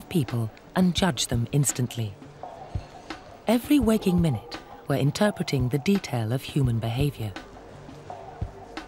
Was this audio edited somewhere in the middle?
yes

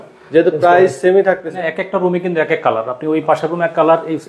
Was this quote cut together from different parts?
yes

